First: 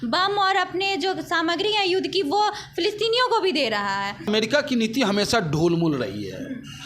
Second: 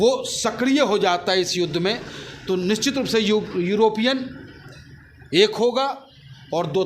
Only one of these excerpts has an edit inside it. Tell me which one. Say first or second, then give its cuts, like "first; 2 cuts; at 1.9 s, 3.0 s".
first; 1 cut; at 4.3 s